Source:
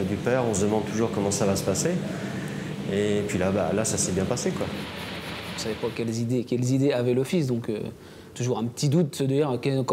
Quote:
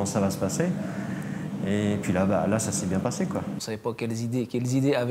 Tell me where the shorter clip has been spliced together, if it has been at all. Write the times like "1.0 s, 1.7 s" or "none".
3.6 s